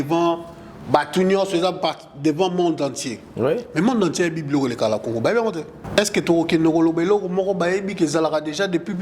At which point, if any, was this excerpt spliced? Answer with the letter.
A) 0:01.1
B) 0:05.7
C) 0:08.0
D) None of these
B